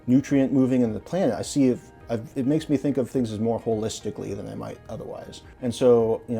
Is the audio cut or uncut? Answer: cut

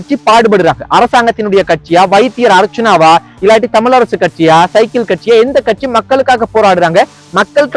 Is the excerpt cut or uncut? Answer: uncut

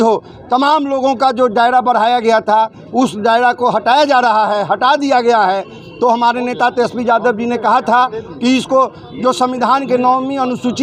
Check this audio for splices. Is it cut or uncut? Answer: uncut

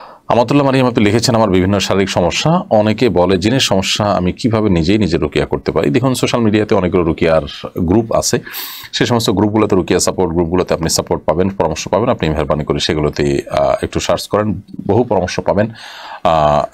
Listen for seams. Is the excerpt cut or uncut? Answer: uncut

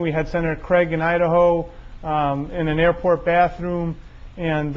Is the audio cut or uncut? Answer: cut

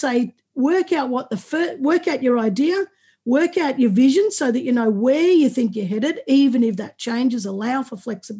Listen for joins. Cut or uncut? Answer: uncut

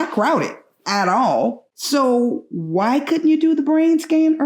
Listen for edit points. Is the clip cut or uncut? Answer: cut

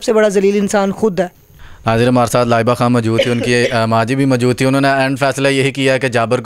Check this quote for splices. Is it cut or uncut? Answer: uncut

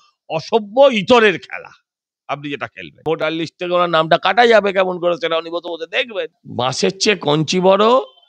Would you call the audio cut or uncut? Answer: cut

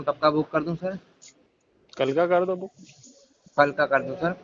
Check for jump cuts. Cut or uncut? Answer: uncut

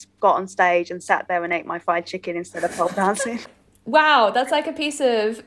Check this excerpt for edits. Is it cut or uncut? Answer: cut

